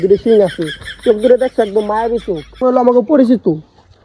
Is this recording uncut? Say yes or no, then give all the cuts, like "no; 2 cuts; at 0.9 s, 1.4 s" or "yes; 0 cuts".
no; 1 cut; at 2.5 s